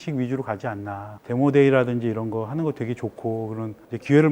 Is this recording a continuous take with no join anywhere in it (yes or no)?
no